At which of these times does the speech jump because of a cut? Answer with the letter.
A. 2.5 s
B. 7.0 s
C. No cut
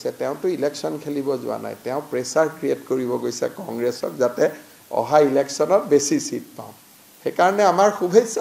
C